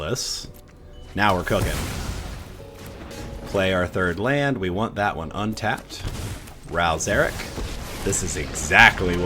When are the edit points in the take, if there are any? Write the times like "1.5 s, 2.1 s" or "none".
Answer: 3.1 s